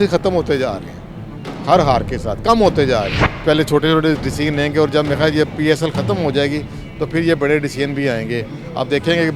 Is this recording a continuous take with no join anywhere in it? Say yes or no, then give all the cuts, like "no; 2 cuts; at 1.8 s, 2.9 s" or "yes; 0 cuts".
no; 1 cut; at 3.2 s